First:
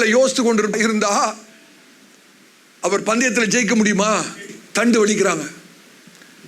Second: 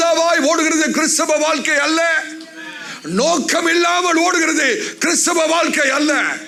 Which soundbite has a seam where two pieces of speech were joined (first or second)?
first